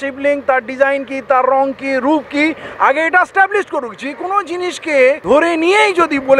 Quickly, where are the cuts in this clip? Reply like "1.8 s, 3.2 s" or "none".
5.2 s